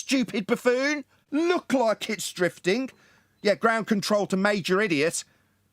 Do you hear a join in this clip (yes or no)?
yes